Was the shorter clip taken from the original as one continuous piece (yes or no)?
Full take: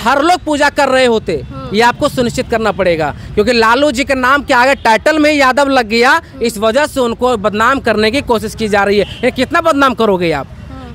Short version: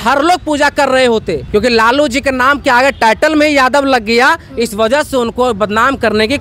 no